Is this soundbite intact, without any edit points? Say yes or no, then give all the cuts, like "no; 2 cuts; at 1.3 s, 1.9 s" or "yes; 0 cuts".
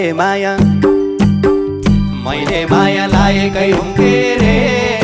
yes; 0 cuts